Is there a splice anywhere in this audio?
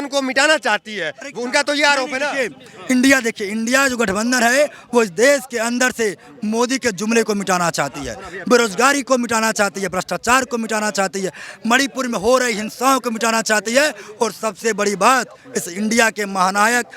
no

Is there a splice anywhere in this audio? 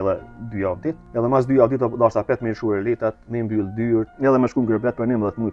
yes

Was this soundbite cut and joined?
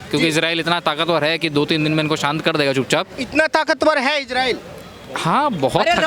no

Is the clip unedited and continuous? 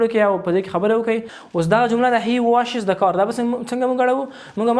no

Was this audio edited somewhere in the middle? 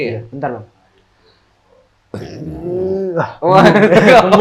no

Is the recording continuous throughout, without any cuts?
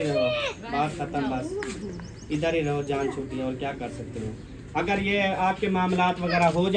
yes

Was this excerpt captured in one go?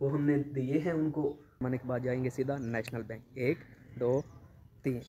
no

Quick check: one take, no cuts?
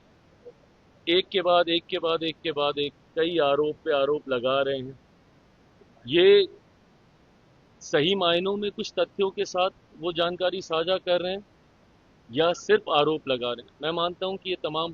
yes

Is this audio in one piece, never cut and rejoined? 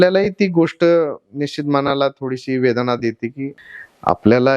no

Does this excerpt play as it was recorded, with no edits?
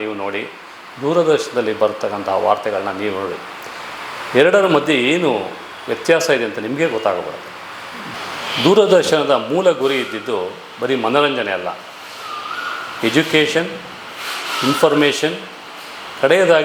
no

